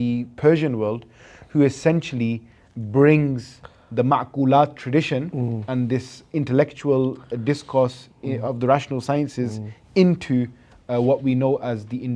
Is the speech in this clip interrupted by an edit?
no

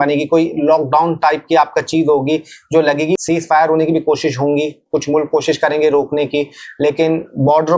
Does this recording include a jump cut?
yes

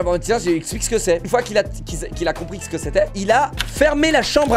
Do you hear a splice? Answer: yes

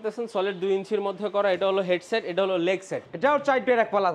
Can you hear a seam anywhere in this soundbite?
yes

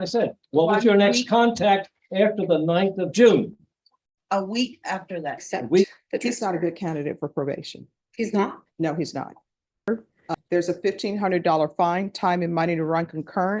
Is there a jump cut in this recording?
yes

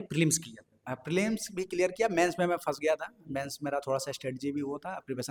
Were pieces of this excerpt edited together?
no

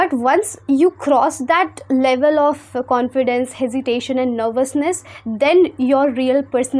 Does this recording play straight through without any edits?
yes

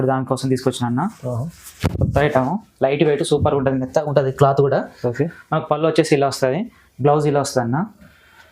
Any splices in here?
no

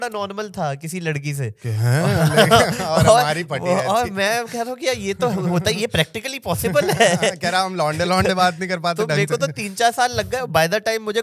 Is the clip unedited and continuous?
yes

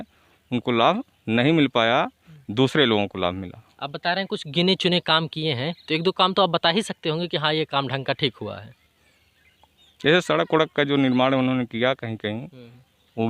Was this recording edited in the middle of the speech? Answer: no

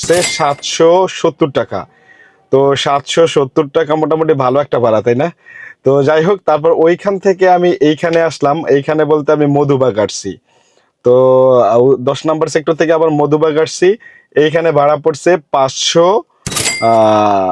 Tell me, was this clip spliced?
no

